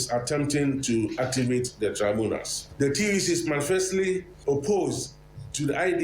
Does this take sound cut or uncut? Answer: cut